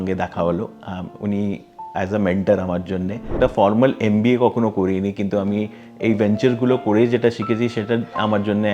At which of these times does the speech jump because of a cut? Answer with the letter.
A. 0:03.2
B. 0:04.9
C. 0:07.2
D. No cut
A